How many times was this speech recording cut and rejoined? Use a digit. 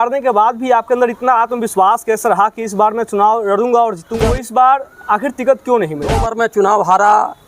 2